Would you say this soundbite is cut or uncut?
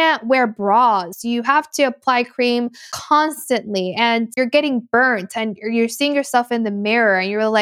cut